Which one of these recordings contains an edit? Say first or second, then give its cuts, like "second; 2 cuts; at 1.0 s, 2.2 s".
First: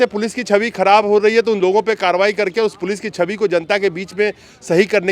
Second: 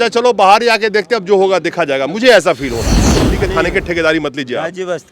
second; 1 cut; at 3.2 s